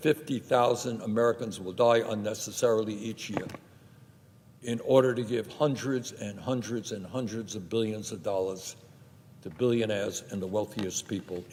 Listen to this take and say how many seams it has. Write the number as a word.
zero